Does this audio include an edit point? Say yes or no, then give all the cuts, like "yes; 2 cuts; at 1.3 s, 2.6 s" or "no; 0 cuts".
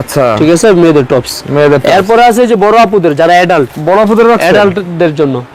no; 0 cuts